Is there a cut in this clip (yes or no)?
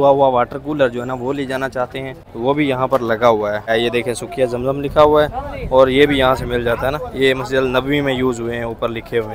no